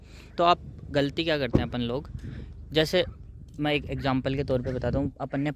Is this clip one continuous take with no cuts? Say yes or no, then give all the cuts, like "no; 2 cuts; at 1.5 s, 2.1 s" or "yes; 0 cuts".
yes; 0 cuts